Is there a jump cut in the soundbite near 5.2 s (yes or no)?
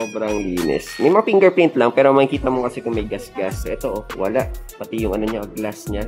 no